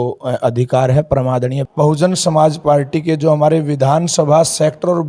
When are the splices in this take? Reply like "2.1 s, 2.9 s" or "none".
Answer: 1.6 s

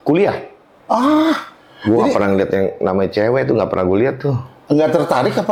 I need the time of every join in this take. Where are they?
none

